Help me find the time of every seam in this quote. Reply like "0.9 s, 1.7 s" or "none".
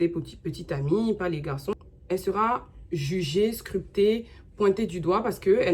1.7 s